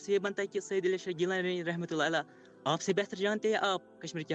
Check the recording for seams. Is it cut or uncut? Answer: uncut